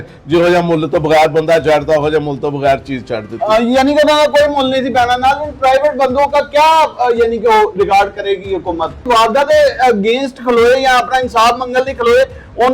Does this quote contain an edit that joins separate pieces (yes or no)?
yes